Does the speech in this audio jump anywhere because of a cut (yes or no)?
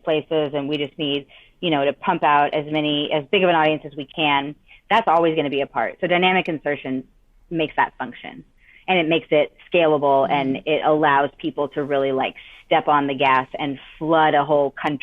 no